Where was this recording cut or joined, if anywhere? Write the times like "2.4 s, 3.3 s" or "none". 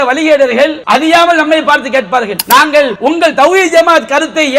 0.8 s, 2.4 s, 2.9 s